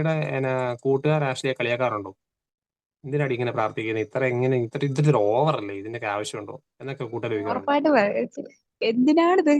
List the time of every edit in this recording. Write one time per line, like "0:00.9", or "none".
0:07.5